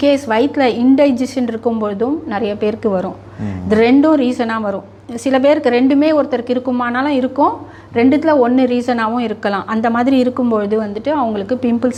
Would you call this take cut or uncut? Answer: uncut